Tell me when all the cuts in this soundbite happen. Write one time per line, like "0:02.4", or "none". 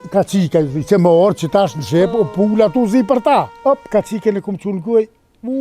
0:03.5